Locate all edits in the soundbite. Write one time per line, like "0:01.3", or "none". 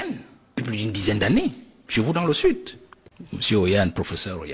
none